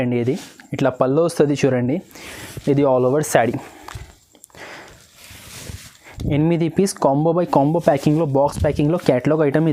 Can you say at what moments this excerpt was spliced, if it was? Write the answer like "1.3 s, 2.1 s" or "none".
none